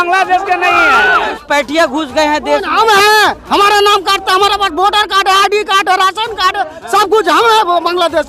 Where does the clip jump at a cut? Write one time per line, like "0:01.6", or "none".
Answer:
0:01.3